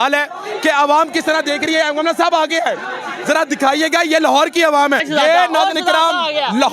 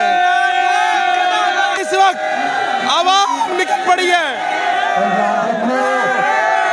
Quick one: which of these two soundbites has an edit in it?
first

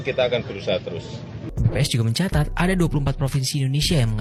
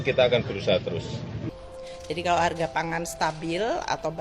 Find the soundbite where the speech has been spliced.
second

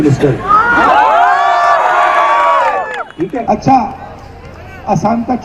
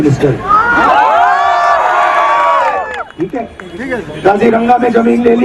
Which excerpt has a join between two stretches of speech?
first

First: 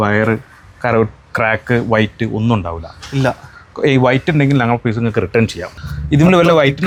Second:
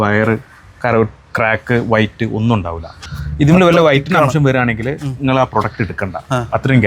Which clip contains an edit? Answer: second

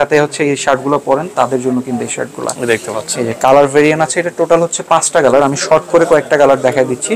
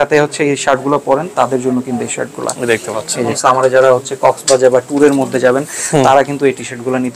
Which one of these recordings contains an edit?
second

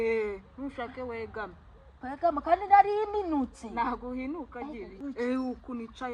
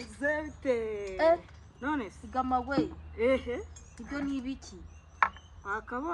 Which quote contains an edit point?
first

